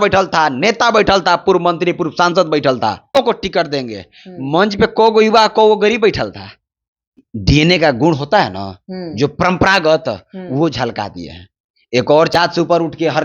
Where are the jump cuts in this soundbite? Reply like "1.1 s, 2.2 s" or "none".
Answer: 3.2 s, 7.3 s, 12.3 s